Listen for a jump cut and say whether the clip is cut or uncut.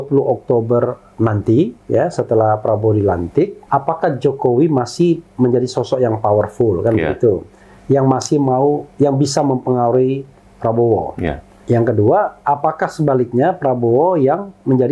cut